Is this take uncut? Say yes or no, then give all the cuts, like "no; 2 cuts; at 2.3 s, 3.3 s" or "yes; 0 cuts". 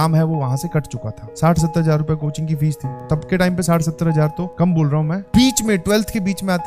no; 3 cuts; at 1.2 s, 3.0 s, 5.2 s